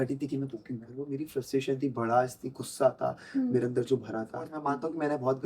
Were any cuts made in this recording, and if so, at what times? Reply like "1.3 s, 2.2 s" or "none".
1.0 s, 4.6 s